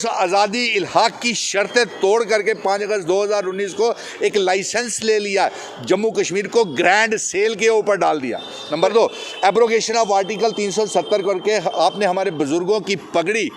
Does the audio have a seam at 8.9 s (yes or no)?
yes